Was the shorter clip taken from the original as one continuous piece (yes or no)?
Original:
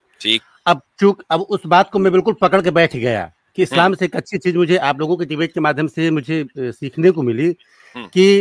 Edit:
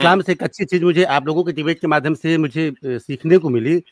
yes